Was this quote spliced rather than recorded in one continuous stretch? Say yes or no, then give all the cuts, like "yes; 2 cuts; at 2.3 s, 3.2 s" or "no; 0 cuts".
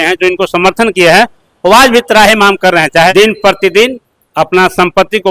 yes; 1 cut; at 3.1 s